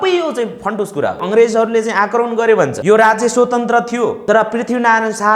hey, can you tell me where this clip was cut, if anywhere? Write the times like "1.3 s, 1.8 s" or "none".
1.2 s, 2.8 s, 4.2 s